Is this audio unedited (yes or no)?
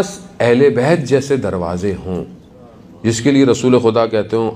yes